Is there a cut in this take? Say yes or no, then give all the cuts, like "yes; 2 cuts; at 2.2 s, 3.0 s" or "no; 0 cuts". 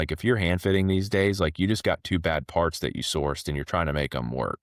no; 0 cuts